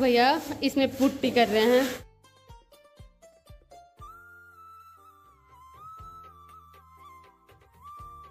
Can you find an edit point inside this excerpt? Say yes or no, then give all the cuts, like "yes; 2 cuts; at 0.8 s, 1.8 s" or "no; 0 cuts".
no; 0 cuts